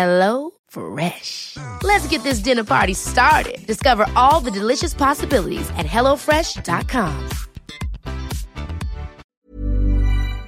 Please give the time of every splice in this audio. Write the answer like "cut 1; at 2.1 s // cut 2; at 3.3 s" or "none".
cut 1; at 9.4 s